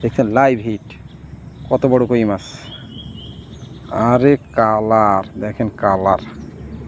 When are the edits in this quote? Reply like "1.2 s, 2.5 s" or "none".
none